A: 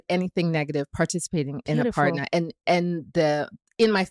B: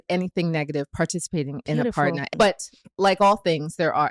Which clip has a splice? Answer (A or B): B